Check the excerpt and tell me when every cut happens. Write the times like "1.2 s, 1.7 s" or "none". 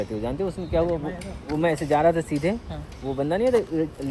none